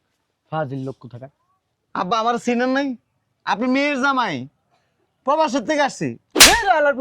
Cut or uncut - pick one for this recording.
uncut